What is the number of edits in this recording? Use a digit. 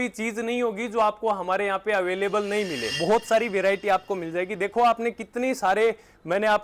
1